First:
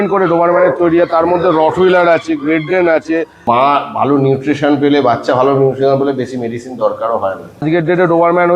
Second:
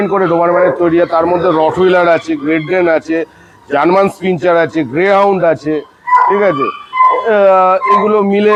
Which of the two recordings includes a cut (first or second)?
first